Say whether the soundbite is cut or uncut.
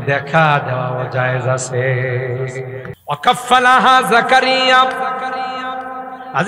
cut